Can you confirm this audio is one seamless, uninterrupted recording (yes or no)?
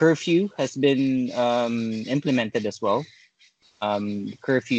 yes